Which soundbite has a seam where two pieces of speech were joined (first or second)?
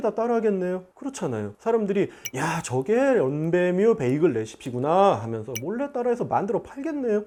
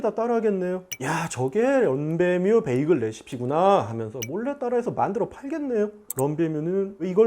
second